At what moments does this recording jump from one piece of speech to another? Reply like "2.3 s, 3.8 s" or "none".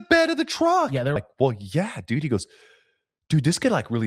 1.2 s